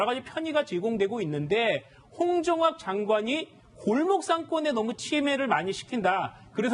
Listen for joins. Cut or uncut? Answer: cut